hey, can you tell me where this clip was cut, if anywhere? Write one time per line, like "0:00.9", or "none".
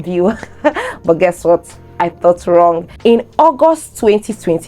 0:02.9